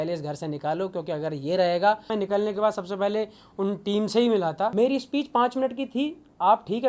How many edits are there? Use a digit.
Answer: 2